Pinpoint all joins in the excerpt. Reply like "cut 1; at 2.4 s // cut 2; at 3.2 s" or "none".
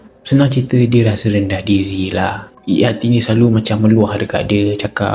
none